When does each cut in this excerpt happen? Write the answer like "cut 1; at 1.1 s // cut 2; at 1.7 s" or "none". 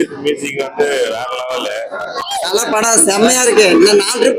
cut 1; at 2.2 s